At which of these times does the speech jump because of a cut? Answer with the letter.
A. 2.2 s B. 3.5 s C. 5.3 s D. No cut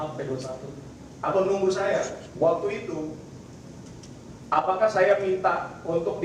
A